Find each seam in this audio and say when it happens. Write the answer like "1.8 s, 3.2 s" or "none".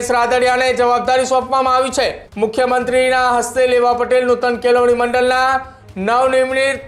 2.2 s